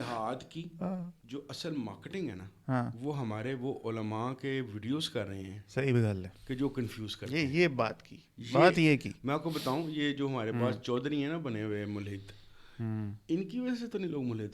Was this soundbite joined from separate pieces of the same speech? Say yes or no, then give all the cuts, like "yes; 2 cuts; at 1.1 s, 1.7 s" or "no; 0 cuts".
yes; 1 cut; at 1.2 s